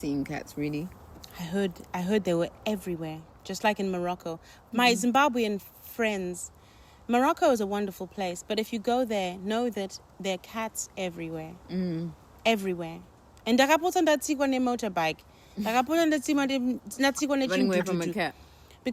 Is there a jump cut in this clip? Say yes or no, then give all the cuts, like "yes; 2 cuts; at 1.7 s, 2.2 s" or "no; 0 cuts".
no; 0 cuts